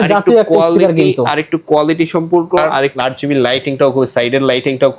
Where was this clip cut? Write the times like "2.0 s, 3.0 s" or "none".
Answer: 2.8 s